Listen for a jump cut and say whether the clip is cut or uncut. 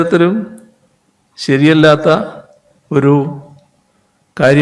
uncut